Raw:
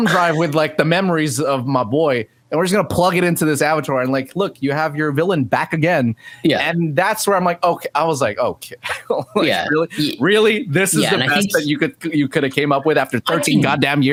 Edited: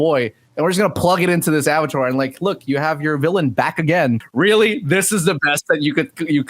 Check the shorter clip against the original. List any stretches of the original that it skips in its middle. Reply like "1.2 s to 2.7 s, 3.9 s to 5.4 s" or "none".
6.2 s to 10.1 s